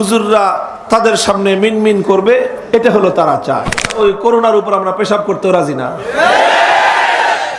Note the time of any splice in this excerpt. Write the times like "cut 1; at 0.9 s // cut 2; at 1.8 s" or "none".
cut 1; at 3.9 s